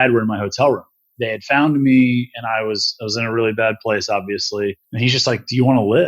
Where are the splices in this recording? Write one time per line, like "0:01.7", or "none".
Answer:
0:01.1
0:04.9